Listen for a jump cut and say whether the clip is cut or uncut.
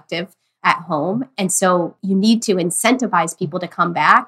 cut